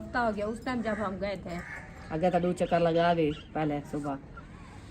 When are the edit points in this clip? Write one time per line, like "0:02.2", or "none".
0:01.5
0:03.4